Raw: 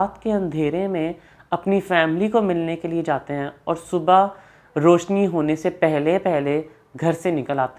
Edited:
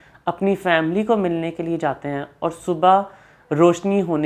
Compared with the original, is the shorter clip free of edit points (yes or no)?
yes